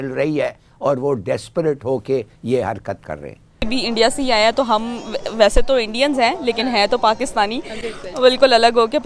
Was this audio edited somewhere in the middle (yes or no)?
yes